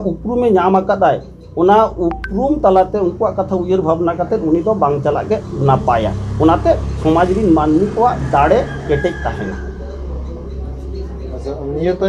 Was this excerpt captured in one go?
yes; 0 cuts

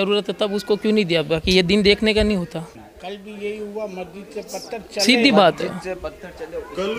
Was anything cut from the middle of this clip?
yes; 1 cut; at 2.8 s

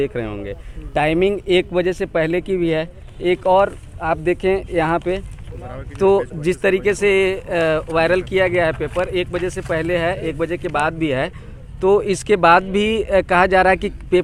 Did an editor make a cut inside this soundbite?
no; 0 cuts

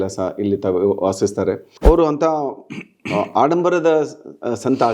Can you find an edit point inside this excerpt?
yes; 1 cut; at 1.7 s

